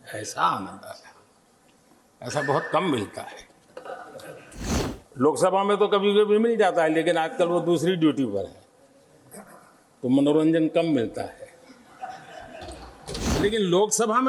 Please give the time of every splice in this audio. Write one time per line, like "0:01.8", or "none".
0:04.9
0:13.4

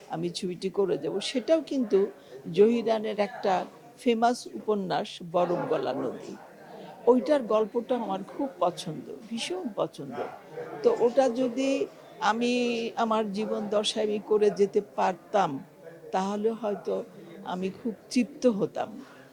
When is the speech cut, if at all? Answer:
none

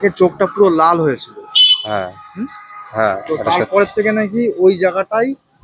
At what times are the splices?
none

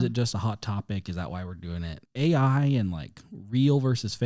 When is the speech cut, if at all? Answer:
0:02.0

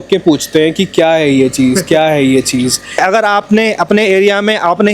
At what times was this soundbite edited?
0:03.0

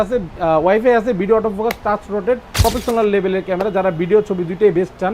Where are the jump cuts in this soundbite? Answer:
0:02.6

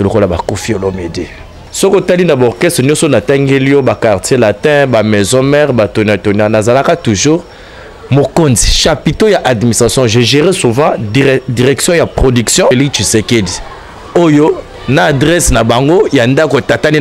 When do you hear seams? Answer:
0:01.6
0:12.7

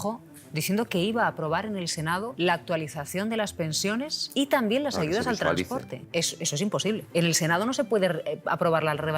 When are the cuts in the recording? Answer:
0:02.3
0:04.2
0:06.0
0:07.0

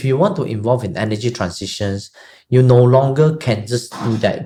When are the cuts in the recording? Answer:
none

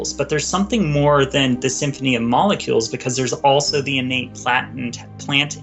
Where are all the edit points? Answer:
none

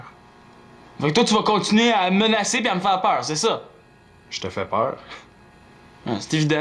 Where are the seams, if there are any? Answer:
none

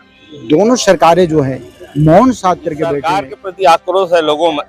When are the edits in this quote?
0:03.0

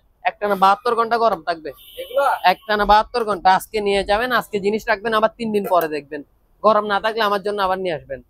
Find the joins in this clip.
none

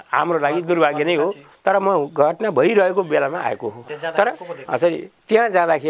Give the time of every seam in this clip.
0:01.5
0:03.9
0:04.5

